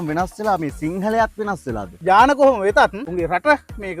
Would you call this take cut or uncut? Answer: cut